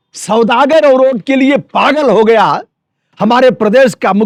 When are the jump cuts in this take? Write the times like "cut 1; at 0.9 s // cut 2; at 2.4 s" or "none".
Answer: none